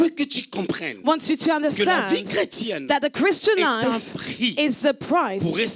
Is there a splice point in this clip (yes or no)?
no